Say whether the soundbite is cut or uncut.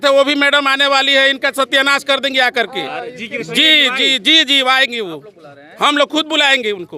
uncut